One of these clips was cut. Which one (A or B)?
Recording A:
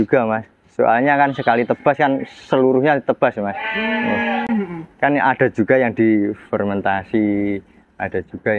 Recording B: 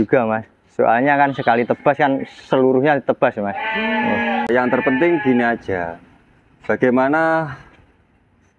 B